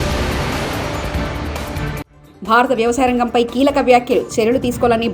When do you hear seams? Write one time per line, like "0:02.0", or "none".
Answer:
0:02.1